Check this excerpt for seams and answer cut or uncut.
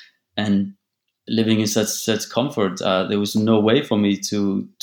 cut